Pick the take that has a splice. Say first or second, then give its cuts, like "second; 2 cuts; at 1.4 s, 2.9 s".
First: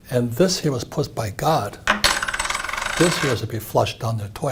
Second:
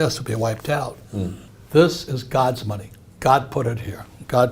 second; 1 cut; at 1.4 s